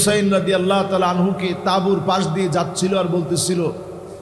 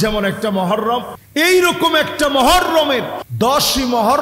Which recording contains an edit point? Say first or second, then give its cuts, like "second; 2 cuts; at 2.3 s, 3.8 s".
second; 2 cuts; at 1.2 s, 3.2 s